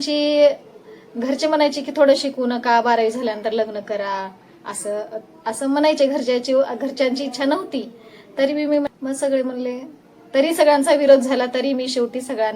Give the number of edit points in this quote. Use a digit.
1